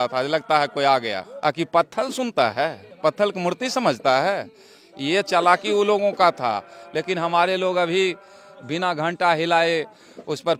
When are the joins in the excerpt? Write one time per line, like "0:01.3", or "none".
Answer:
none